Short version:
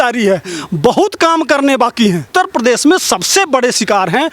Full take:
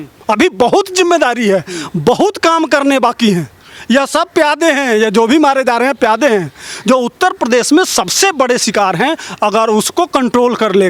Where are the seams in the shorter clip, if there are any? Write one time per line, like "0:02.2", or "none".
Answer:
0:02.3